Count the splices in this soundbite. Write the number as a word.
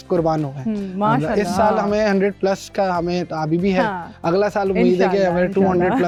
zero